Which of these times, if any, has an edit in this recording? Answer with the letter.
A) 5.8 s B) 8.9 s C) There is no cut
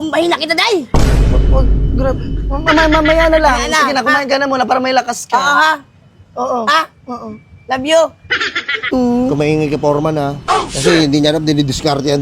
B